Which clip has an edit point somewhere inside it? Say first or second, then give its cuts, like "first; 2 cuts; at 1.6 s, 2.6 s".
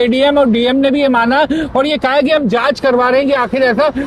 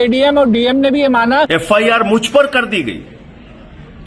second; 1 cut; at 1.5 s